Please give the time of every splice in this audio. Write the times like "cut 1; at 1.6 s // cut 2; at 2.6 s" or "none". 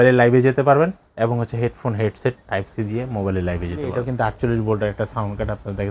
cut 1; at 4.0 s